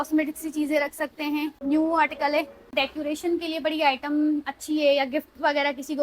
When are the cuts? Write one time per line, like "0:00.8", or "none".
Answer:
0:01.6
0:02.7